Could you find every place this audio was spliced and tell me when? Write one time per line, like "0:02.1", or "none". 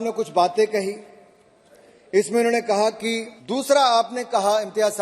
0:03.3